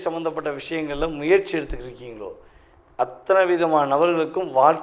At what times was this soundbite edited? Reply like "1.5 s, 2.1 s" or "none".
none